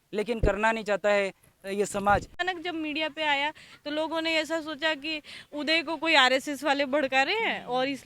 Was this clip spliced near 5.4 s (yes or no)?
no